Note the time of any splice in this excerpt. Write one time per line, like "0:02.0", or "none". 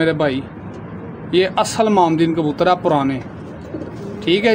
none